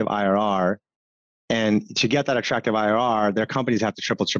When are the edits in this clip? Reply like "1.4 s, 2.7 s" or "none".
none